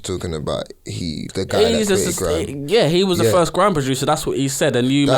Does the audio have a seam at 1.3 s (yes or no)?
yes